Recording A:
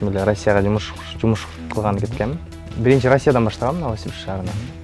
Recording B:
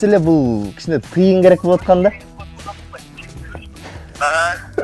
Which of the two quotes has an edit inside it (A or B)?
A